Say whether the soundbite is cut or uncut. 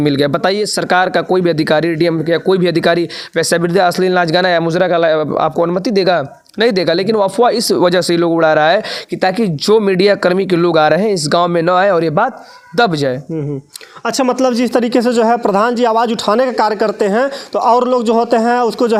uncut